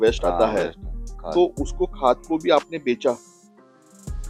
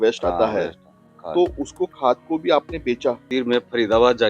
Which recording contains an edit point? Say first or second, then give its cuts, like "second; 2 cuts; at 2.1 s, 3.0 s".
second; 1 cut; at 3.2 s